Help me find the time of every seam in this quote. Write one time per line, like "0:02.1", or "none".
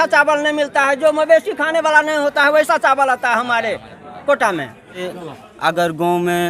0:05.1